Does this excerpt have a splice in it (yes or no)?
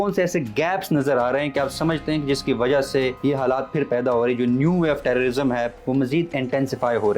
yes